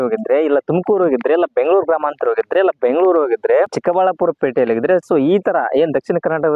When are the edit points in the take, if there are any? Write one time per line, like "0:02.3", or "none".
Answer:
none